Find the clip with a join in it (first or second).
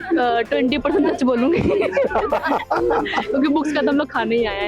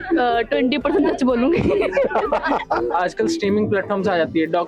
second